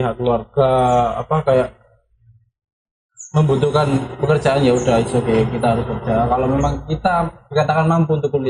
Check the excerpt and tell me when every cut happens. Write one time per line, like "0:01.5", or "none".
none